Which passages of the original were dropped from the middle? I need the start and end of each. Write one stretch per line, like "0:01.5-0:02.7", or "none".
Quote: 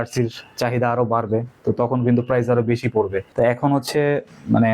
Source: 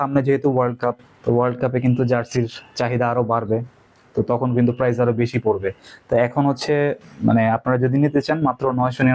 0:03.7-0:04.0
0:05.7-0:06.0